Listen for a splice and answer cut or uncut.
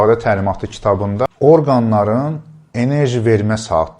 cut